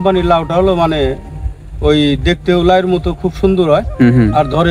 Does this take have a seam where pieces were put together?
no; 0 cuts

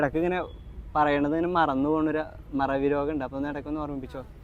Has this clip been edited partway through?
no; 0 cuts

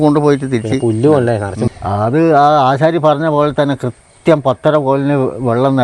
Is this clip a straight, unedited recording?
no; 1 cut; at 1.7 s

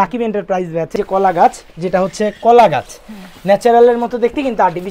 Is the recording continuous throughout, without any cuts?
no; 1 cut; at 0.9 s

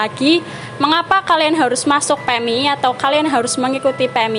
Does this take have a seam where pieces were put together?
no; 0 cuts

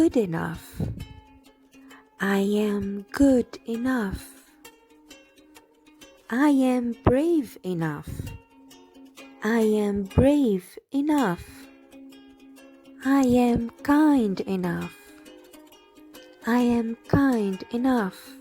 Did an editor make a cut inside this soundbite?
yes; 2 cuts; at 11.5 s, 13.0 s

